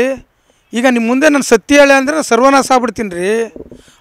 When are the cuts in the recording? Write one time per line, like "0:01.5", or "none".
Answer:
none